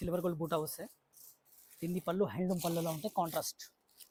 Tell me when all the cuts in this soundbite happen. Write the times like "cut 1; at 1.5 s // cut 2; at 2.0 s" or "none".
none